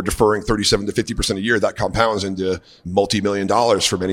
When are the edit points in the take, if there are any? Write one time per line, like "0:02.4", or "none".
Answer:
0:02.8